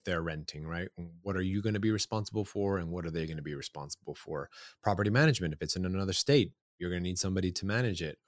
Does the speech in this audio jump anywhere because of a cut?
no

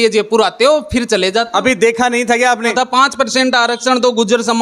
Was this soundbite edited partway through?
yes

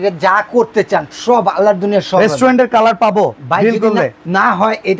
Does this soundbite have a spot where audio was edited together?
no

